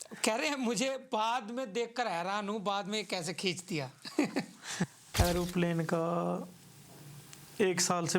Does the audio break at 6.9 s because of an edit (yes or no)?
no